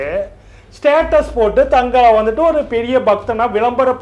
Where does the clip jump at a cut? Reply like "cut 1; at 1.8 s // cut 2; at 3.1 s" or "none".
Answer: none